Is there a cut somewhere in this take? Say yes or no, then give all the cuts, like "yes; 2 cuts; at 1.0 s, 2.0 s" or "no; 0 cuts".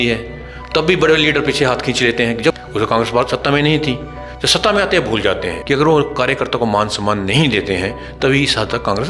yes; 2 cuts; at 2.6 s, 5.6 s